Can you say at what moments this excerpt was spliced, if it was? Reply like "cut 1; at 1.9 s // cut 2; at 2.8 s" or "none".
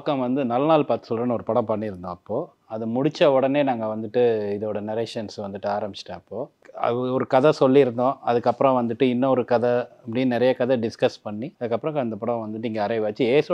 cut 1; at 6.6 s // cut 2; at 11.5 s